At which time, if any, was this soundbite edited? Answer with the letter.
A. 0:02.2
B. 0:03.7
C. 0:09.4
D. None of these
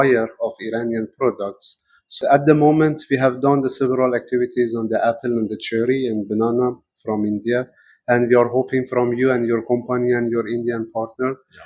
A